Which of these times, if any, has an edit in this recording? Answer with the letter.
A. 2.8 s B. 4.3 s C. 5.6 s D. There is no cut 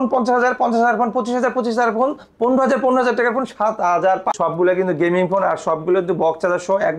B